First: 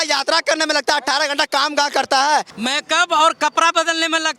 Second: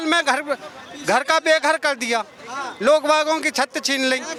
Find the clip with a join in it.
first; 1 cut; at 2.5 s

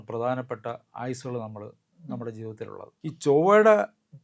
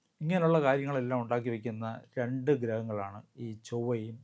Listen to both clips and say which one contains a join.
first; 1 cut; at 2.8 s

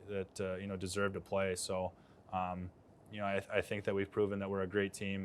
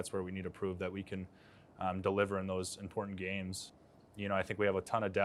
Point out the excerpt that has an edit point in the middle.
second; 1 cut; at 3.7 s

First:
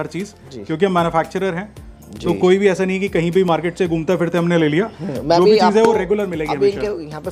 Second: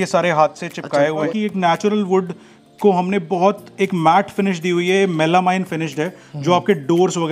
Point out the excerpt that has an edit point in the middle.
second; 1 cut; at 1.3 s

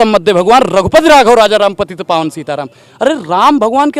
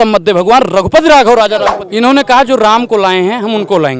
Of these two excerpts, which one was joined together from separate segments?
second; 1 cut; at 1.8 s

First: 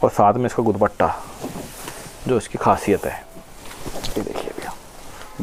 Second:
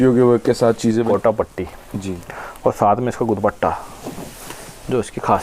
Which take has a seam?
second; 1 cut; at 1.1 s

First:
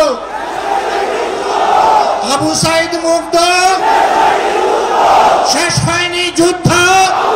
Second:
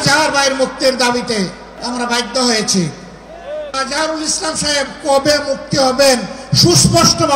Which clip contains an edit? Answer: second; 2 cuts; at 1.7 s, 3.7 s

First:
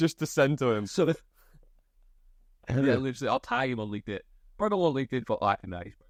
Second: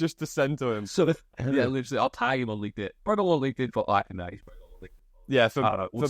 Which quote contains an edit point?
second; 2 cuts; at 1.3 s, 2.9 s

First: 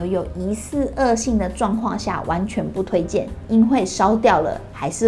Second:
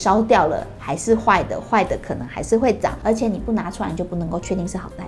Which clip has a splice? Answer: second; 1 cut; at 3.0 s

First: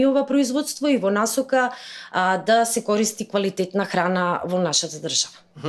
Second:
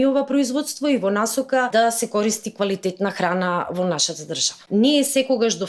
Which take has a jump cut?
second; 2 cuts; at 1.7 s, 4.5 s

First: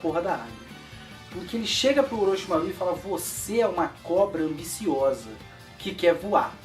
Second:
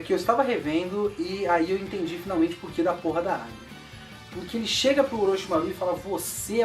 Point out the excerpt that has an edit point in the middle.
second; 1 cut; at 1.7 s

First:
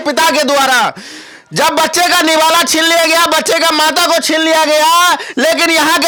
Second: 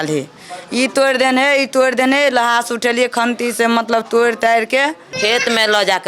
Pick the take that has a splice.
second; 1 cut; at 5.1 s

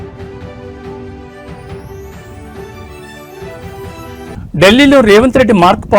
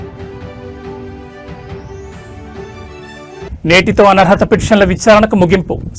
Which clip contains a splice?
first; 1 cut; at 3.5 s

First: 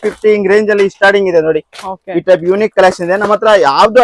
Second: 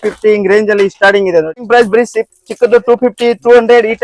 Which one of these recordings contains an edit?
second; 1 cut; at 1.6 s

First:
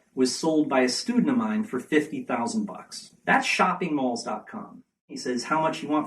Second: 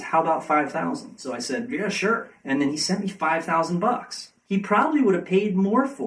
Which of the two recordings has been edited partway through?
first; 1 cut; at 5.2 s

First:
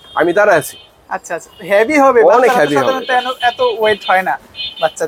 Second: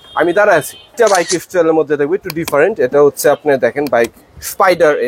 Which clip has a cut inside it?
second; 1 cut; at 0.9 s

